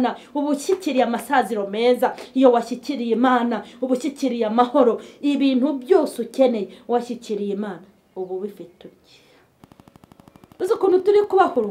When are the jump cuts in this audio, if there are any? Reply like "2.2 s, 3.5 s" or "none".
9.6 s

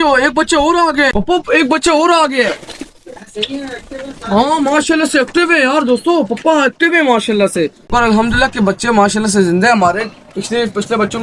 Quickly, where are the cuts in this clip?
7.9 s

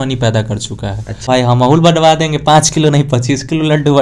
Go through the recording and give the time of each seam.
1.3 s

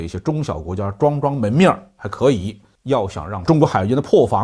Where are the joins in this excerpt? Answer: 3.4 s

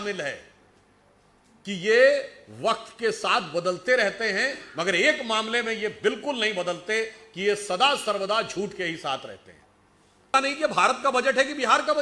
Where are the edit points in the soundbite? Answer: 10.3 s

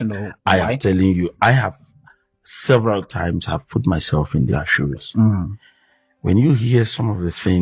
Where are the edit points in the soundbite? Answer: none

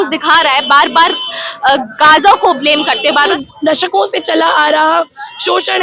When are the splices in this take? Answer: 3.2 s

